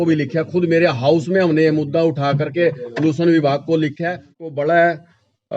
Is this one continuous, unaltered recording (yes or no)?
no